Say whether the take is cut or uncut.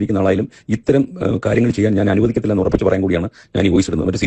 uncut